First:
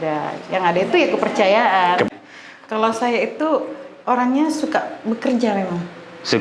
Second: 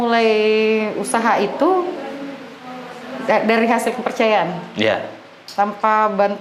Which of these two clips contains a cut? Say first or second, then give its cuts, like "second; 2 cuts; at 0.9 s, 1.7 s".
first; 1 cut; at 2.1 s